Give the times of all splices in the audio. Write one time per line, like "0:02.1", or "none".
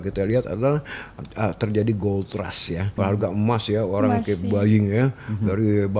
0:02.9